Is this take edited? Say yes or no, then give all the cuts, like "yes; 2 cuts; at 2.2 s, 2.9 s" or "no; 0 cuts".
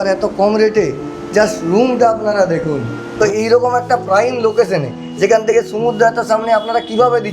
yes; 1 cut; at 3.1 s